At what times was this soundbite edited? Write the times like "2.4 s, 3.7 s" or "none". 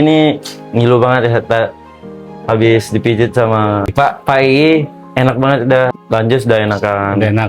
3.9 s, 6.0 s